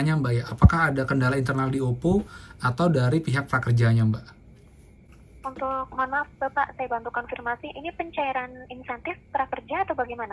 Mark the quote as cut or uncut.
uncut